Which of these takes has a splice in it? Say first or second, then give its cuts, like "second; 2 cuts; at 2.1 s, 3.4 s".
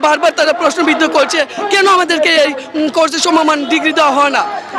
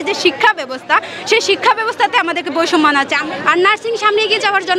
second; 1 cut; at 3.2 s